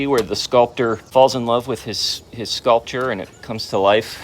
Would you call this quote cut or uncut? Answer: cut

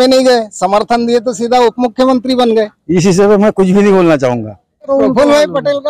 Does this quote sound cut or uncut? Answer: cut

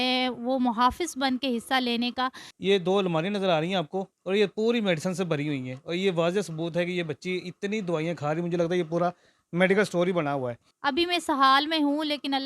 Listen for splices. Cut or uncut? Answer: uncut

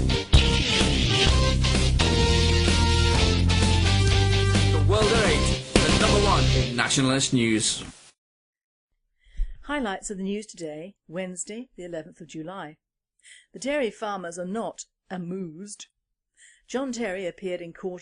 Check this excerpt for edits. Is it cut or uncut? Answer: cut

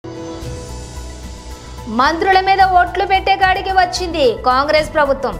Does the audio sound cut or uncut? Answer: cut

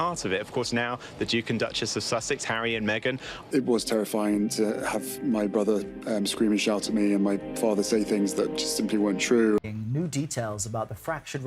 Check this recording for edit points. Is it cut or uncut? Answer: cut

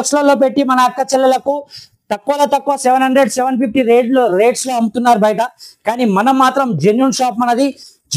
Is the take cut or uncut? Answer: uncut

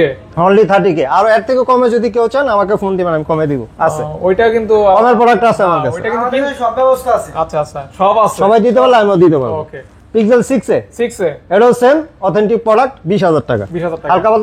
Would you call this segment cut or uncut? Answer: uncut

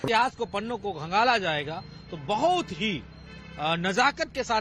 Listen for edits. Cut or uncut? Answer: uncut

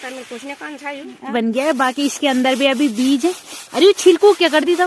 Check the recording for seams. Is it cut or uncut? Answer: cut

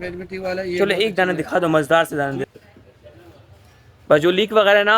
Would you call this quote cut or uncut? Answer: cut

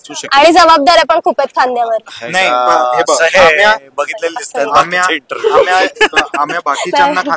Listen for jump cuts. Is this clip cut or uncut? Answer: uncut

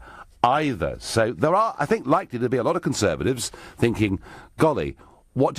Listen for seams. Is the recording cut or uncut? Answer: cut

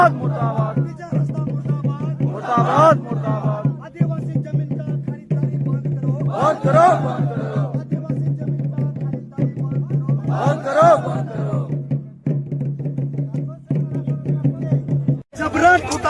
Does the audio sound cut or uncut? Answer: cut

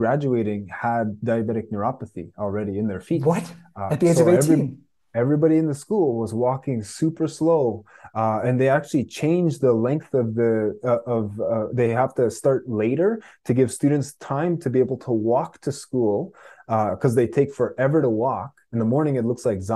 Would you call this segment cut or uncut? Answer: uncut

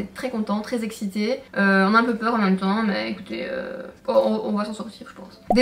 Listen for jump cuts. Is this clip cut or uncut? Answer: uncut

